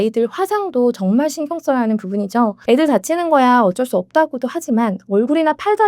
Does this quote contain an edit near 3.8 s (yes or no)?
no